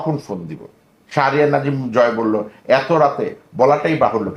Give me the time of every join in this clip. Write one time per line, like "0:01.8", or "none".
none